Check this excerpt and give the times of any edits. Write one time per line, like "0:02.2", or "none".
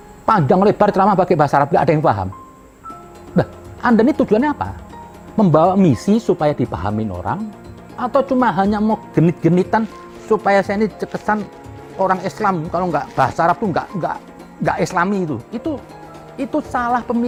none